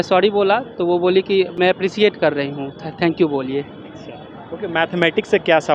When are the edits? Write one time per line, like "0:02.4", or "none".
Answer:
none